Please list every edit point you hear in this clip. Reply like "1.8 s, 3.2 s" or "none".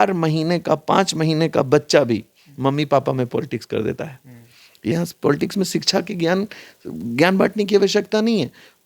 4.9 s